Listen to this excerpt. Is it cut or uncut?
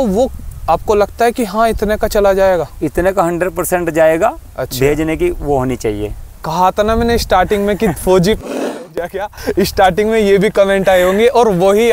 cut